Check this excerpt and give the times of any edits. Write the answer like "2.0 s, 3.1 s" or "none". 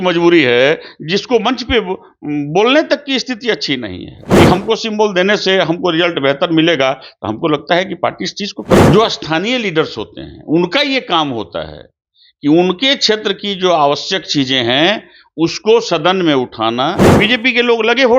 4.2 s, 8.8 s, 17.1 s